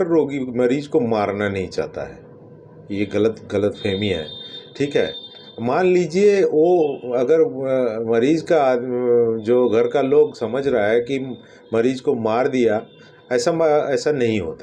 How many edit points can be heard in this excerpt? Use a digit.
0